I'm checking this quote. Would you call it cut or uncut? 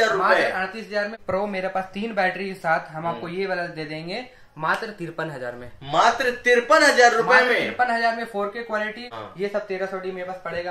cut